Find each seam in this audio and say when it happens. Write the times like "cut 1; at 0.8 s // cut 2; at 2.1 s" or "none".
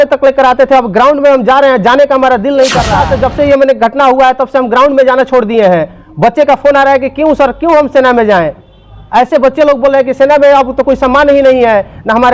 cut 1; at 3.0 s